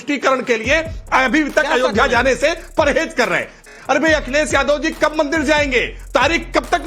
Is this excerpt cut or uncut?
cut